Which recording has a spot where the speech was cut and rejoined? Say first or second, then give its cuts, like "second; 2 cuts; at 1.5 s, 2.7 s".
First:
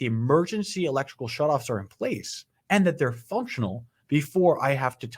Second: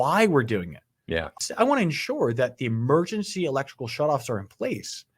second; 1 cut; at 1.3 s